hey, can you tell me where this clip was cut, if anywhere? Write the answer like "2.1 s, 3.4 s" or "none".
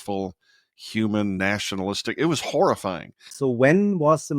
3.3 s